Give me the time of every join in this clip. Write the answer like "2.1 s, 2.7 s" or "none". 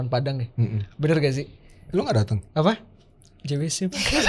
none